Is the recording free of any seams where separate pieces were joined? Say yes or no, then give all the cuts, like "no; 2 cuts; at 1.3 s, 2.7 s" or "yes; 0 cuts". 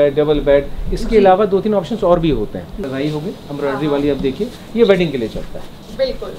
no; 1 cut; at 2.8 s